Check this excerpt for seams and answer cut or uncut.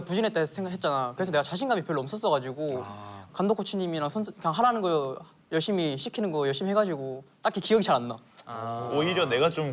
uncut